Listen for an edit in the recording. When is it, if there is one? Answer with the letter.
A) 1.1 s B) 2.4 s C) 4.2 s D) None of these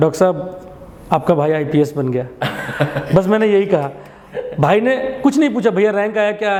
D